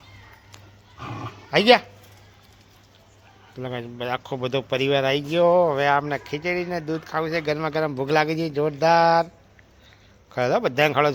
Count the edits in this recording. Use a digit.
0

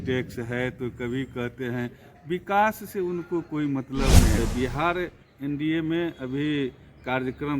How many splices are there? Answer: 1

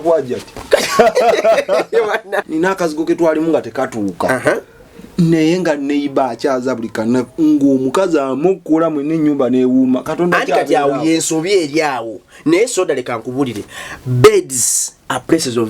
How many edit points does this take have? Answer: 1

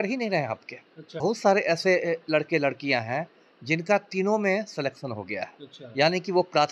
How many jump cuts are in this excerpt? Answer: 1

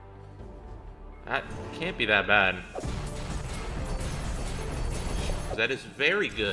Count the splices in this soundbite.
2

